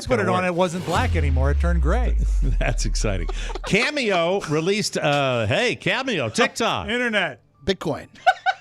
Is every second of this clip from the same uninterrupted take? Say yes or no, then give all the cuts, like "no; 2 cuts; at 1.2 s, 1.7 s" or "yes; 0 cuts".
yes; 0 cuts